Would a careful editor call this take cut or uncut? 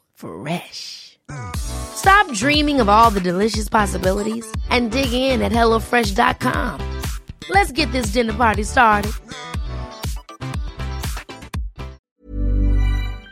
cut